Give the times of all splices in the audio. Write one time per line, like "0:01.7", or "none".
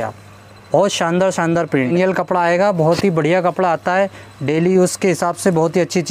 0:01.9